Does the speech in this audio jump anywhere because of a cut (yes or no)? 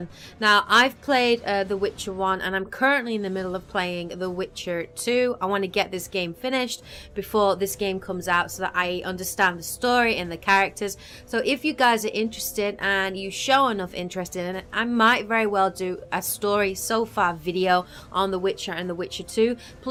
no